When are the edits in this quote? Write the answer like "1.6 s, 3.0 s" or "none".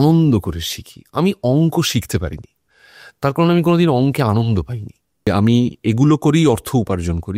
5.3 s